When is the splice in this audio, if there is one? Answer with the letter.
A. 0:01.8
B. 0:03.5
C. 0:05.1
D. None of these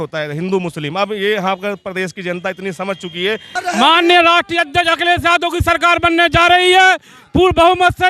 B